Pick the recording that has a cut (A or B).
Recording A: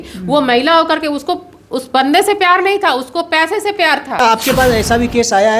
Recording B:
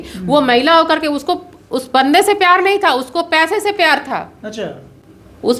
A